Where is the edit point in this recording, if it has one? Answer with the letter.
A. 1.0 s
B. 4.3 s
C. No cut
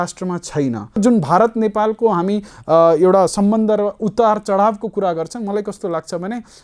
A